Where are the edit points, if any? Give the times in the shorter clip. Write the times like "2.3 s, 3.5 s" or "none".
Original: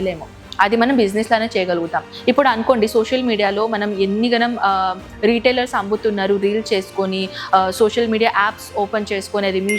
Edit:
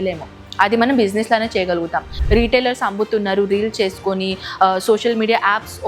2.1 s